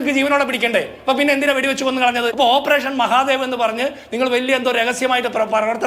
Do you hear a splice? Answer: yes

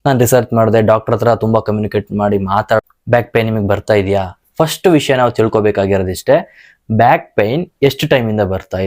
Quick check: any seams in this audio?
yes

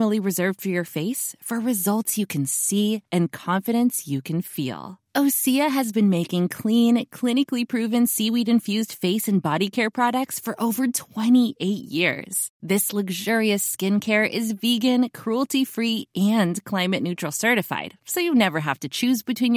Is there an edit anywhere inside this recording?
no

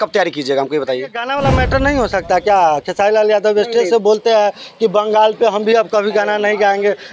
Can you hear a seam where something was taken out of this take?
yes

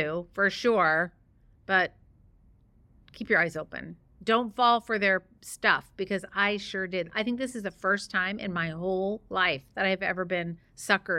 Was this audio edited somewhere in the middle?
no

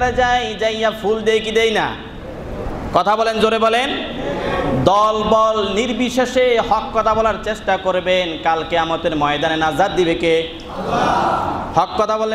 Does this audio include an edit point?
no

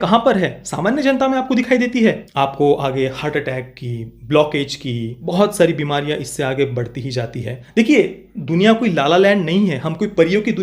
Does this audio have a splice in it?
yes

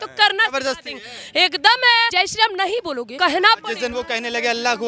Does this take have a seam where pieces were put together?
yes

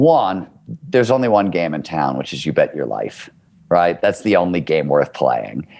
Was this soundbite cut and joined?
no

